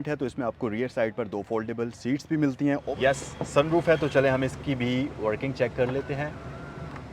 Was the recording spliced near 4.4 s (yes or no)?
no